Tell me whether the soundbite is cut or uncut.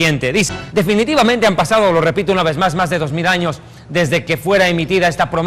uncut